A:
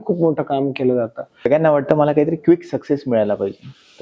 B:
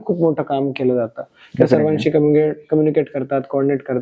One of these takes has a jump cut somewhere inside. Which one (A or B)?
A